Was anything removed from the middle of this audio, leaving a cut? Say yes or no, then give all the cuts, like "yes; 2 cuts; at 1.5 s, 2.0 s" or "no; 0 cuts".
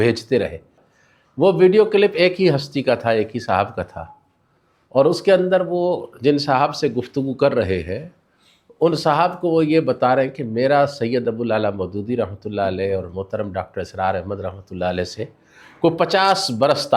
no; 0 cuts